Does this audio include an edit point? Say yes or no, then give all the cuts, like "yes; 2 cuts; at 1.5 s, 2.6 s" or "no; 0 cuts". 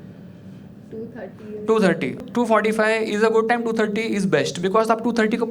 yes; 1 cut; at 2.2 s